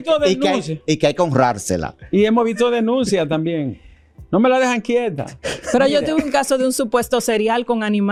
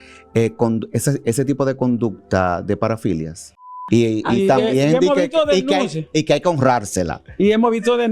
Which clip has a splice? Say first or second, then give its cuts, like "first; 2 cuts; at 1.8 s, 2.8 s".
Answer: second; 1 cut; at 3.7 s